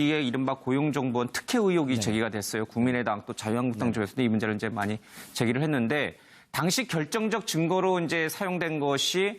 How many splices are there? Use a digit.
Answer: 1